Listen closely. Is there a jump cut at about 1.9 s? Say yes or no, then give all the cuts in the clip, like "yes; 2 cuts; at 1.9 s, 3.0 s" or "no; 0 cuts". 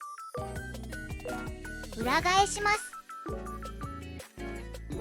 yes; 2 cuts; at 1.9 s, 2.9 s